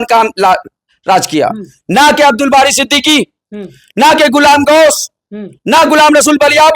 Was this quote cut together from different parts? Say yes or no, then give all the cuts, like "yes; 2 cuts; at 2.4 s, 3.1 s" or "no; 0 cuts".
no; 0 cuts